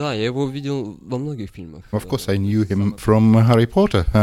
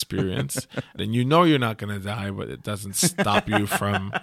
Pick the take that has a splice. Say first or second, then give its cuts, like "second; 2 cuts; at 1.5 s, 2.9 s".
second; 1 cut; at 1.0 s